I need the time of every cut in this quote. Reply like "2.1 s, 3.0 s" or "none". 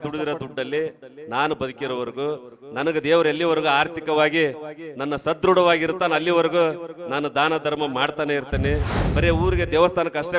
9.0 s